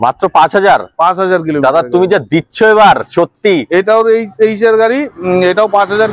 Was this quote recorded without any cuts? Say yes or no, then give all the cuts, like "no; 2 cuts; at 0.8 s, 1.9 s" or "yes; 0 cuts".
yes; 0 cuts